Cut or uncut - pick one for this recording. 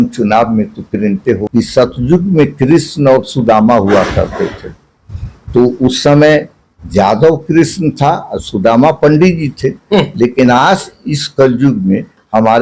cut